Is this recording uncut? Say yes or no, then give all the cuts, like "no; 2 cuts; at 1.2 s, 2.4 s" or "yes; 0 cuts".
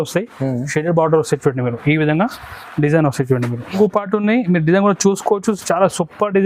no; 1 cut; at 3.8 s